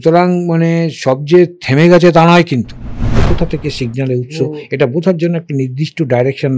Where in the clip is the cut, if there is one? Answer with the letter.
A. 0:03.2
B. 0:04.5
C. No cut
A